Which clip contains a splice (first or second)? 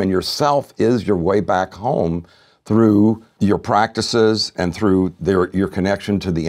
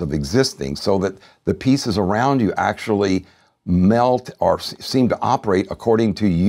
first